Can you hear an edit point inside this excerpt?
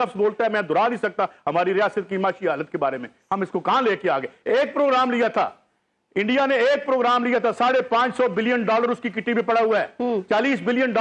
no; 0 cuts

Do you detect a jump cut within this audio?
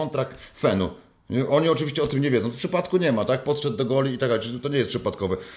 no; 0 cuts

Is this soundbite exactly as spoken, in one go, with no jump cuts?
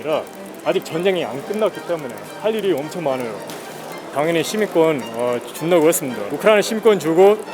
no; 2 cuts; at 4.1 s, 6.3 s

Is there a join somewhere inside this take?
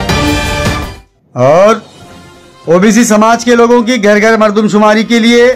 no; 0 cuts

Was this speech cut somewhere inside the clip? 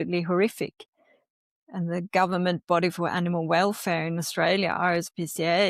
no; 0 cuts

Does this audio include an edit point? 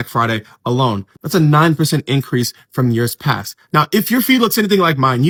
no; 0 cuts

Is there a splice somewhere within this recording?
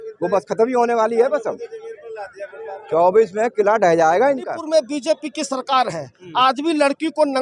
yes; 1 cut; at 4.6 s

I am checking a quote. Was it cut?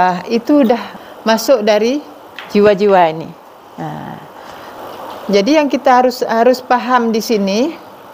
yes; 2 cuts; at 0.9 s, 4.8 s

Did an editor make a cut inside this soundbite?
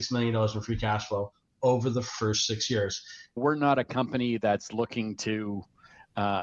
yes; 1 cut; at 3.4 s

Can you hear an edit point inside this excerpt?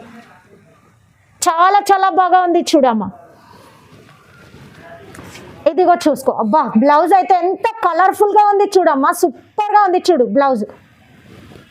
no; 0 cuts

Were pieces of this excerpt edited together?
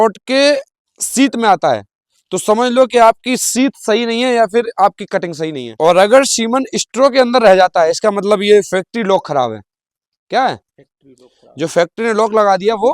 yes; 1 cut; at 5.6 s

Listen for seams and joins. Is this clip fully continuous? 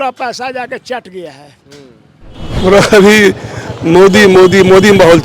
no; 1 cut; at 2.4 s

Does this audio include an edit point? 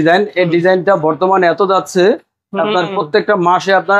no; 0 cuts

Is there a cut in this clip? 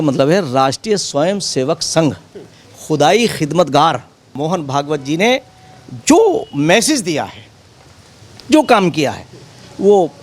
yes; 1 cut; at 4.3 s

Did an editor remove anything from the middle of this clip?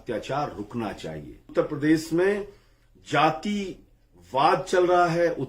yes; 1 cut; at 1.5 s

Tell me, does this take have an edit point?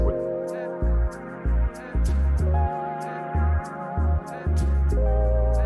no; 0 cuts

